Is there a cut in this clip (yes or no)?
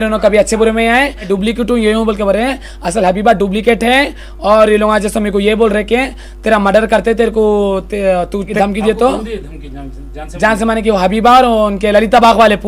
yes